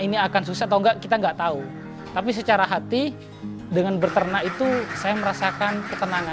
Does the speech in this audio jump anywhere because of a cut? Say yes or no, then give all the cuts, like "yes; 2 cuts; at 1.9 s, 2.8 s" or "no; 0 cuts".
no; 0 cuts